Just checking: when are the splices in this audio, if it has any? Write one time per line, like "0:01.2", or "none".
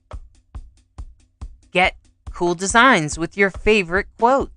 0:01.6